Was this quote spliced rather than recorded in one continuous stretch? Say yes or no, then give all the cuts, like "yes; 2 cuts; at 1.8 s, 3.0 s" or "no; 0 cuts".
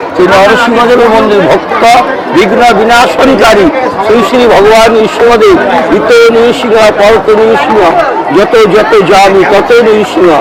no; 0 cuts